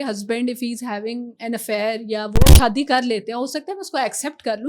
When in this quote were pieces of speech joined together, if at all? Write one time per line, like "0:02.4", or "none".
0:02.5